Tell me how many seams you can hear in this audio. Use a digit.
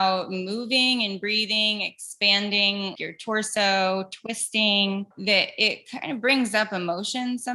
1